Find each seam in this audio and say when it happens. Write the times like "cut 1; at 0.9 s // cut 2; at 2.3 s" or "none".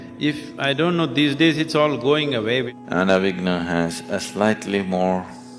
cut 1; at 2.7 s